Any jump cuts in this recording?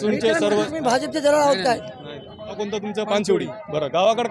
yes; 1 cut; at 2.4 s

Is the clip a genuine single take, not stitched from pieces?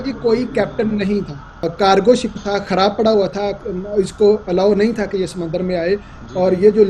no; 1 cut; at 1.6 s

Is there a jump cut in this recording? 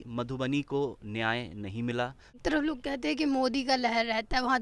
yes; 1 cut; at 2.4 s

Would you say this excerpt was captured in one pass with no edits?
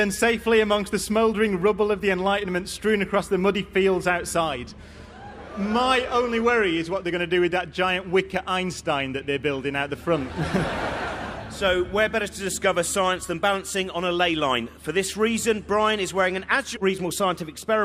yes; 0 cuts

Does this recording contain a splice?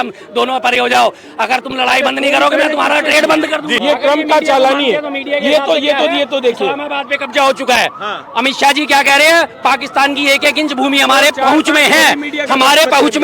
yes; 1 cut; at 3.7 s

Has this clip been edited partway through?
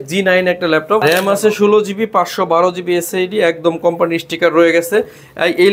yes; 1 cut; at 1.0 s

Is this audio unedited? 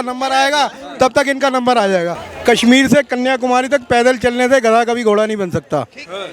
no; 1 cut; at 2.2 s

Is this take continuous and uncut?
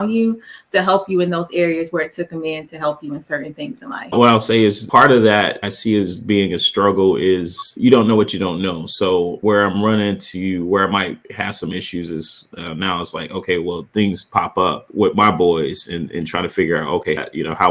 yes; 0 cuts

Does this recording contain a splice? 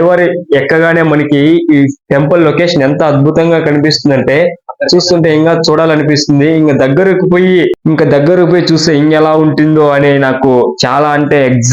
no; 0 cuts

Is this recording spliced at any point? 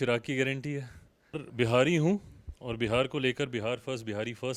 yes; 1 cut; at 1.5 s

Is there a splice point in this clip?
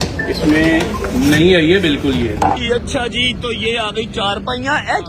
yes; 1 cut; at 2.6 s

